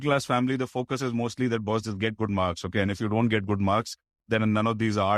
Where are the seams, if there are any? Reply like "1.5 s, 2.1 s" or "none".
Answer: none